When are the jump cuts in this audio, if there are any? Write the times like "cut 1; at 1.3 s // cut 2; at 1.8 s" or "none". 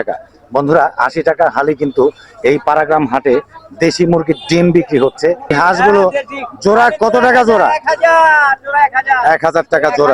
cut 1; at 5.5 s